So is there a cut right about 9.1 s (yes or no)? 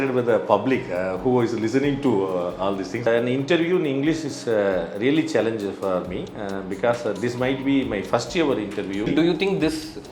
yes